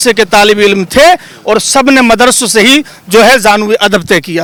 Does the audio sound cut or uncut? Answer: uncut